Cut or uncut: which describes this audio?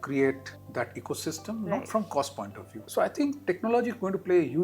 cut